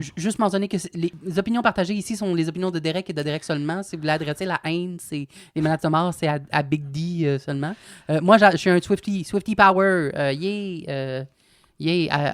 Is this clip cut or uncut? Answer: cut